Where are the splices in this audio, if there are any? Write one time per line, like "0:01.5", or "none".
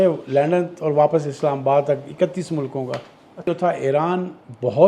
0:03.4